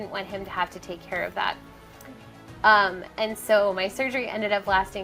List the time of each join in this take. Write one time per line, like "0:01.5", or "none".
none